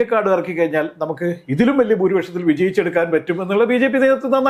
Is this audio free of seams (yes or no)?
yes